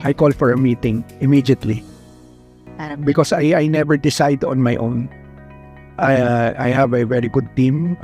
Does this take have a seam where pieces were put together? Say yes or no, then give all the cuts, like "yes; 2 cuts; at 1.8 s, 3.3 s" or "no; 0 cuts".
no; 0 cuts